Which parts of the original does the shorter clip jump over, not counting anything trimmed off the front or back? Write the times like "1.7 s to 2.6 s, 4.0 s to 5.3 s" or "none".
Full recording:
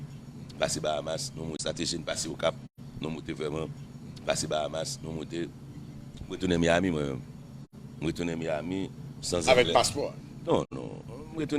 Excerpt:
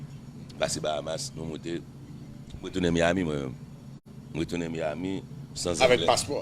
1.4 s to 5.1 s